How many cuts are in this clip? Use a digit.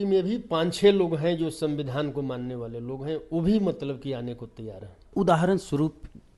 1